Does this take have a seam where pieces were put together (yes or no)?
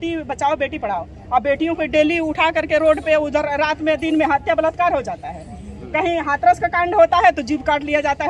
no